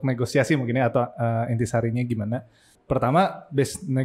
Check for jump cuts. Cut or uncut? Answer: cut